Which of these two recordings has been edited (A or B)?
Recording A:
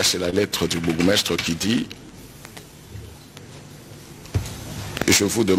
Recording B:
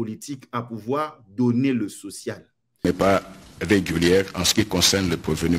B